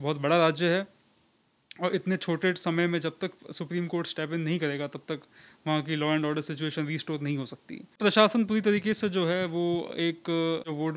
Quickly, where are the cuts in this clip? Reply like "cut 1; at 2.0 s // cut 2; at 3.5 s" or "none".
cut 1; at 8.0 s